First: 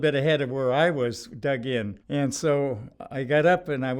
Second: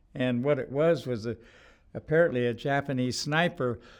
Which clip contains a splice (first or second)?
first